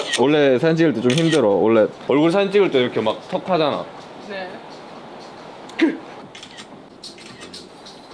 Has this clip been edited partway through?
yes; 2 cuts; at 2.0 s, 6.2 s

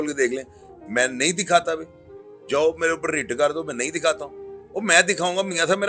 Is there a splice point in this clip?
no; 0 cuts

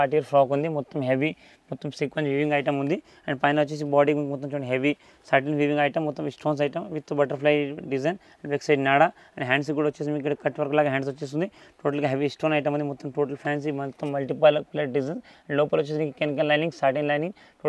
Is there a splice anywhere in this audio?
no; 0 cuts

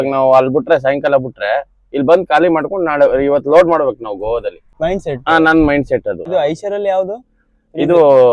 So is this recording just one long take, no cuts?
no; 2 cuts; at 4.6 s, 6.2 s

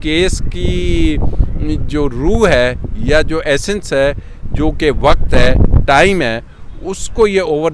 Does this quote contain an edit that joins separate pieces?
no; 0 cuts

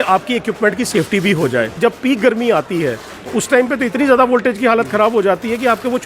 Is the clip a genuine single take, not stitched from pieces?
no; 1 cut; at 1.7 s

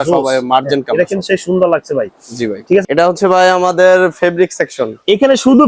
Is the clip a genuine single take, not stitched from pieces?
no; 1 cut; at 2.8 s

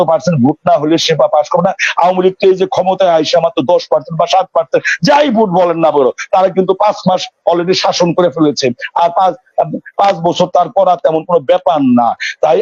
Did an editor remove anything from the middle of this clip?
no; 0 cuts

